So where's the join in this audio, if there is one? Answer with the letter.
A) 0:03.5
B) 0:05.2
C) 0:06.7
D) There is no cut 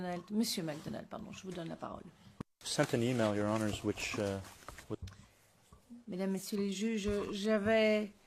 A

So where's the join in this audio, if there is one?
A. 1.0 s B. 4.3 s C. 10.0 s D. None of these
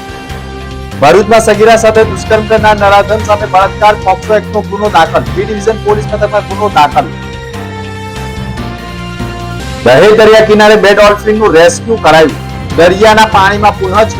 A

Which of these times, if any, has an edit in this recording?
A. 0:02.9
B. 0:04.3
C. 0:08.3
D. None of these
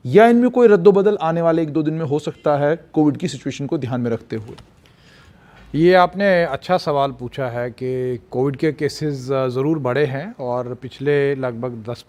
D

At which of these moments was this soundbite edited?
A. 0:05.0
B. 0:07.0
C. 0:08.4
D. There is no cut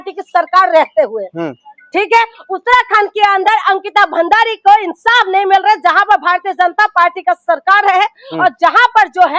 D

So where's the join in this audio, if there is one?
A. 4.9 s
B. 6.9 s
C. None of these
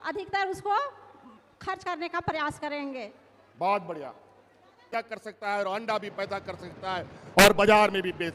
A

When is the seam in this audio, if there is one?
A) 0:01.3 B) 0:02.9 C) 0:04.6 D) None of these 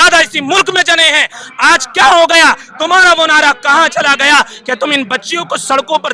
D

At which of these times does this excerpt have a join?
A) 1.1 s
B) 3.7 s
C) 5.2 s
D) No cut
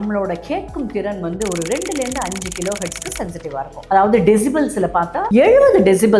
C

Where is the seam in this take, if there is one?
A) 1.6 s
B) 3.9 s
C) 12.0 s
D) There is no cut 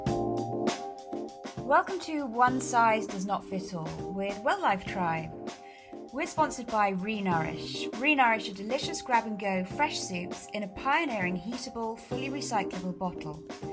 A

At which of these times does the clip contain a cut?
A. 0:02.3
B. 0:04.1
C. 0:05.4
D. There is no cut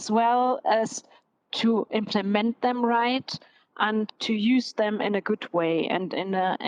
B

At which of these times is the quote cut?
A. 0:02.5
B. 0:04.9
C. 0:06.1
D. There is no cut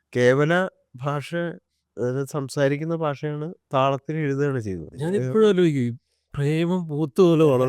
B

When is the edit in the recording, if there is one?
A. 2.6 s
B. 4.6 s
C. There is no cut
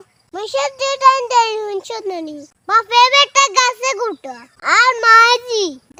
C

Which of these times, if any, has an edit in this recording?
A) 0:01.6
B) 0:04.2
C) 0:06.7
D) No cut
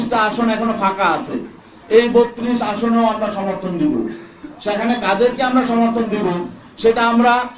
D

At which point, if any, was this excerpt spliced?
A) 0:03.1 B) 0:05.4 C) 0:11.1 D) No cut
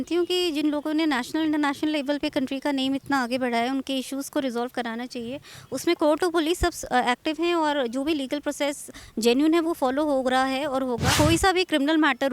C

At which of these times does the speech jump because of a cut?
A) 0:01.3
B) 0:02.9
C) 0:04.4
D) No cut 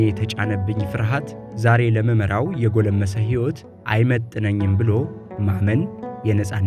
D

